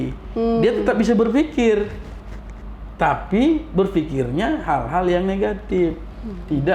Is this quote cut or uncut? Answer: uncut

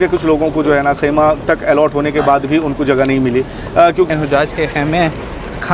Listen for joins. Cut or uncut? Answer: cut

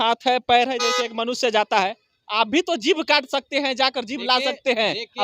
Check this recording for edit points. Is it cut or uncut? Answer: uncut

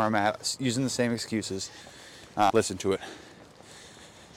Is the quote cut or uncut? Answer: cut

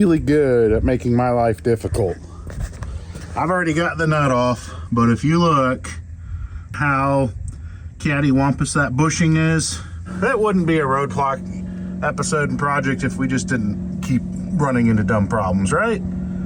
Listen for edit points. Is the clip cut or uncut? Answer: cut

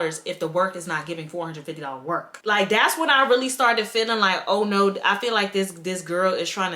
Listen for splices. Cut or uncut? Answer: cut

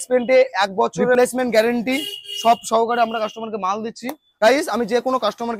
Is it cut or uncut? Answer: cut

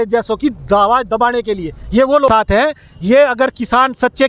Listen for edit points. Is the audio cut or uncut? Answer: cut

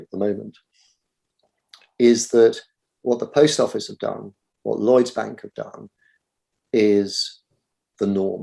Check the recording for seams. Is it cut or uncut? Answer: uncut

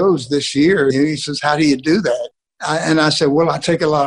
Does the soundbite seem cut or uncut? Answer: cut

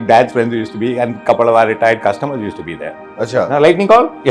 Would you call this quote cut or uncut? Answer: uncut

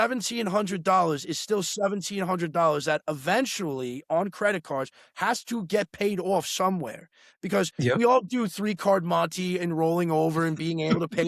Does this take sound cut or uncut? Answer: uncut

